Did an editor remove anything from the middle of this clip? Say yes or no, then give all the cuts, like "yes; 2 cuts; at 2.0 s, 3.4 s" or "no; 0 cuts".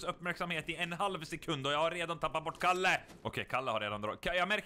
yes; 1 cut; at 3.1 s